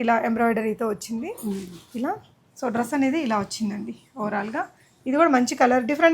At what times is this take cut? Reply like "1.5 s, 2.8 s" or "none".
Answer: none